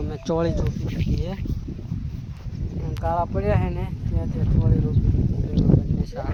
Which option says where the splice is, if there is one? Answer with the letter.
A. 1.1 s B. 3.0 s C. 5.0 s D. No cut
D